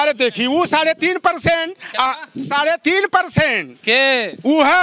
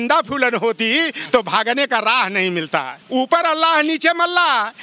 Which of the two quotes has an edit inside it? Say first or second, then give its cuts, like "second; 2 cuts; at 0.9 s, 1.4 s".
second; 1 cut; at 3.0 s